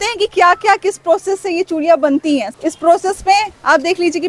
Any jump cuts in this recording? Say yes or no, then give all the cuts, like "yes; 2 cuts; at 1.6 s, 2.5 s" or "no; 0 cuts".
yes; 1 cut; at 2.5 s